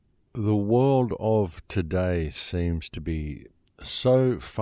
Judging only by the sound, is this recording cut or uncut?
cut